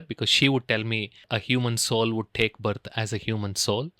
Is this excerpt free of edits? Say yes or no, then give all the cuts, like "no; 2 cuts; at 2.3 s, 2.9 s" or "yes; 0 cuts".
no; 1 cut; at 1.2 s